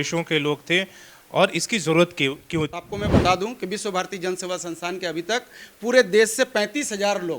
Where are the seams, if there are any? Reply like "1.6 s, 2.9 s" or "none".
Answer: 2.8 s